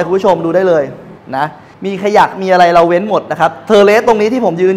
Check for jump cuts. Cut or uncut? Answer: cut